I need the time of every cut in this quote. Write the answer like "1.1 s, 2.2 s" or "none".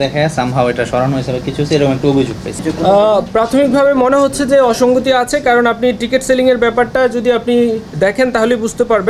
2.6 s

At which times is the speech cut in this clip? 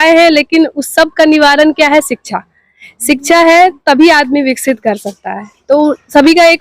none

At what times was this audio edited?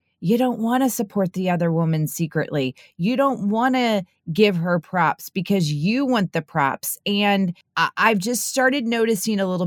7.6 s

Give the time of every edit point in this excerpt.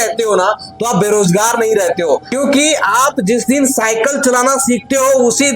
2.3 s

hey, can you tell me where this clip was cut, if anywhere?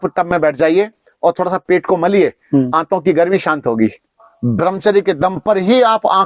4.3 s

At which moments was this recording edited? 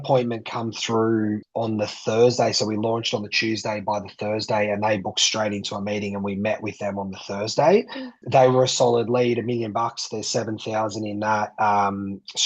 1.4 s, 8.2 s

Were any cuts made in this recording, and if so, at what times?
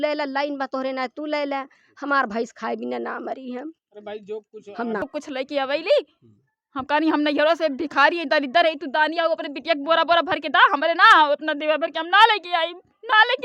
5.0 s

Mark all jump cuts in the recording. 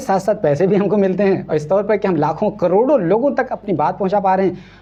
none

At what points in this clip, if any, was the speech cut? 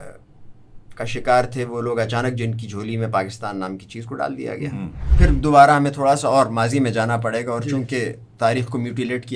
5.0 s

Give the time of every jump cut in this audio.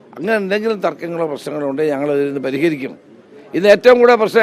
none

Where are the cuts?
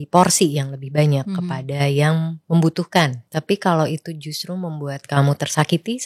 2.4 s, 3.2 s

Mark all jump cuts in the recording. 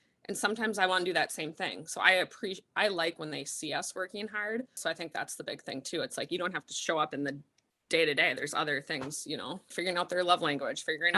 4.8 s, 9.8 s

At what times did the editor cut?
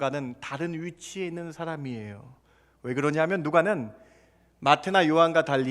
none

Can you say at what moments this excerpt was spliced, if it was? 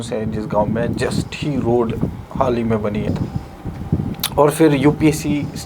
3.1 s

